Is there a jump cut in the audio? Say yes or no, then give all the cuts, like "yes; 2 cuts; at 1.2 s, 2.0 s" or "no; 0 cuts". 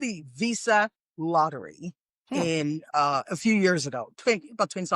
no; 0 cuts